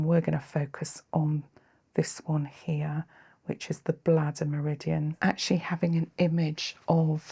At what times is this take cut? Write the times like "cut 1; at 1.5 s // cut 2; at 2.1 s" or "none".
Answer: cut 1; at 5.1 s